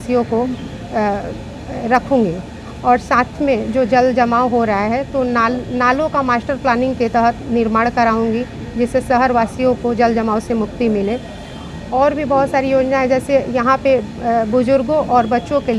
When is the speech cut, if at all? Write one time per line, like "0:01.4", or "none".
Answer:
none